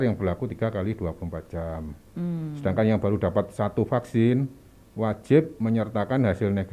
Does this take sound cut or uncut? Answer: uncut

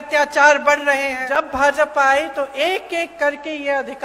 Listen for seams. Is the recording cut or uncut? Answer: cut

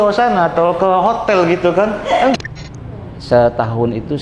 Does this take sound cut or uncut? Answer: cut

